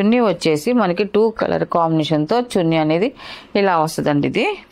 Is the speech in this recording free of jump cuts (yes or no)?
yes